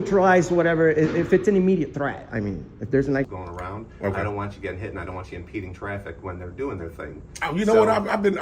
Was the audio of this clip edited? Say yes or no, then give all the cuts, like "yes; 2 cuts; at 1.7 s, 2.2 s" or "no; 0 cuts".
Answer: yes; 1 cut; at 3.3 s